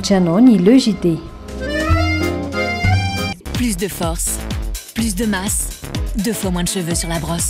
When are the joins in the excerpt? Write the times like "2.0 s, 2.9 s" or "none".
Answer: 3.4 s

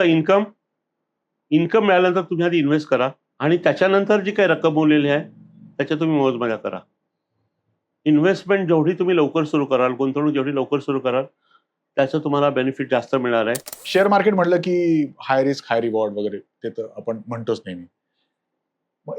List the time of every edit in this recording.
3.2 s, 13.7 s

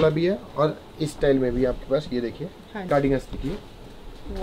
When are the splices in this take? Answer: 2.8 s

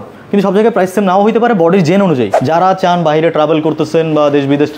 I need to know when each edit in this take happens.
2.4 s

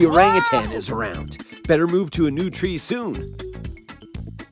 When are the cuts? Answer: 3.1 s

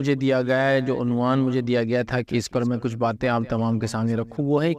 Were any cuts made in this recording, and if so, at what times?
none

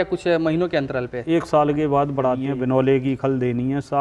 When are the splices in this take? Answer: 2.5 s

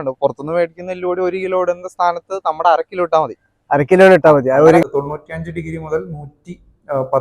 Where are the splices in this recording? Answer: 4.8 s

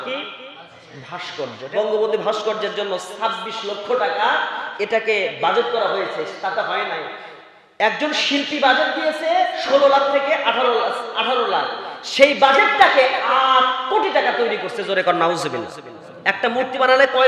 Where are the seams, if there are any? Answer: 1.6 s

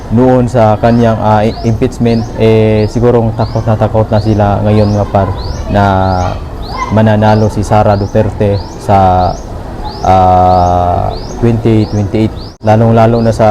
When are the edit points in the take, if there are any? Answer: 12.5 s

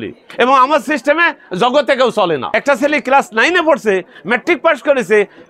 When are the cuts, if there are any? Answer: 2.5 s

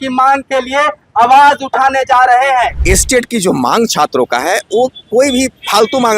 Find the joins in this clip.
2.8 s

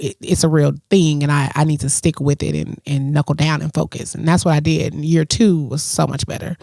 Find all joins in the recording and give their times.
none

